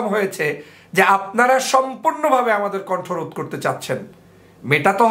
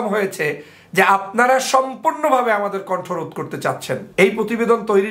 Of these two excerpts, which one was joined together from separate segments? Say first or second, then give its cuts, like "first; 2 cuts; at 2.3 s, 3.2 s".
second; 1 cut; at 4.0 s